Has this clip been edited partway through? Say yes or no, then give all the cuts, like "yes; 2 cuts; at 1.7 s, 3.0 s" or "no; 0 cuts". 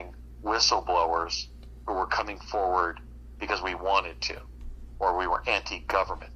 no; 0 cuts